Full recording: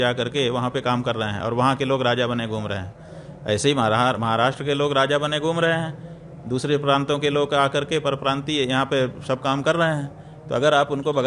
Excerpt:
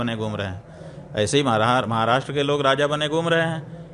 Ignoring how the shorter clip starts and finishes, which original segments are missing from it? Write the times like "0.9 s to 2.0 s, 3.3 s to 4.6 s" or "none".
none